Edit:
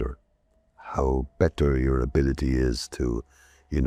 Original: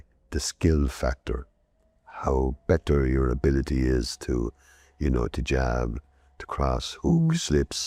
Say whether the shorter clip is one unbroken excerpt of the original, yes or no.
yes